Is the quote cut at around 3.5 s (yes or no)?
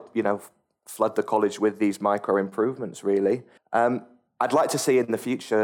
yes